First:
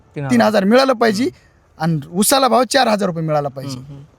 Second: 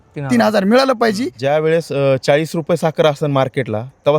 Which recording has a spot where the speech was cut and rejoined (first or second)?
second